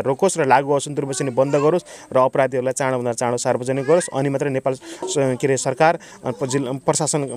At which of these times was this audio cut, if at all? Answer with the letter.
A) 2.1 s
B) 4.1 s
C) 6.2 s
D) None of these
D